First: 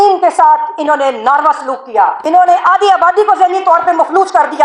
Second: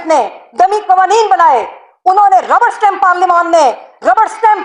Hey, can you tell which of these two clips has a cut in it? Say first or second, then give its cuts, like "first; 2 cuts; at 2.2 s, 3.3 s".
first; 1 cut; at 2.2 s